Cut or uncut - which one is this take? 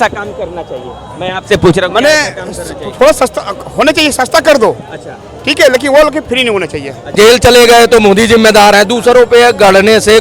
cut